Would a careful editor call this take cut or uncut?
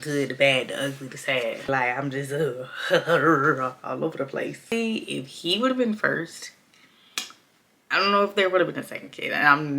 cut